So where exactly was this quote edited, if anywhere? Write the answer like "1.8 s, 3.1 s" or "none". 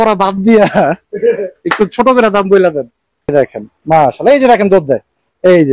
3.3 s